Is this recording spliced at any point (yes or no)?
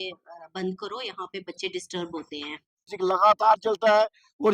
yes